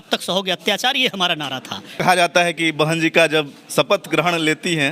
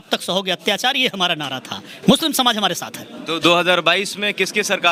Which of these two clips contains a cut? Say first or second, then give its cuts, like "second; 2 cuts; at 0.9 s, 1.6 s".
first; 1 cut; at 2.0 s